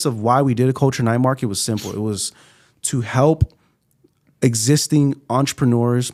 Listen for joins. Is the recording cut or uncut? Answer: uncut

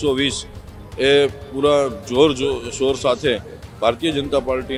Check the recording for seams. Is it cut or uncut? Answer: uncut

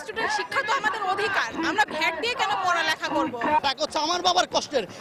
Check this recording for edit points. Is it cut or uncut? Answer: cut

